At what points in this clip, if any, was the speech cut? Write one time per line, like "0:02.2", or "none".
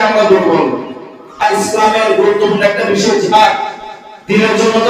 0:01.4